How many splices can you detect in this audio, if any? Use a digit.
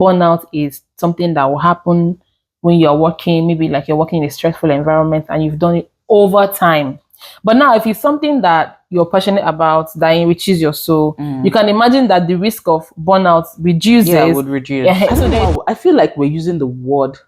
1